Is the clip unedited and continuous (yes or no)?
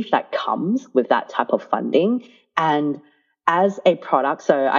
yes